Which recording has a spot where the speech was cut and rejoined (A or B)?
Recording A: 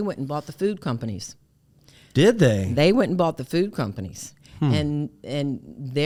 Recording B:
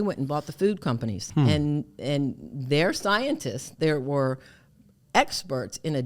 B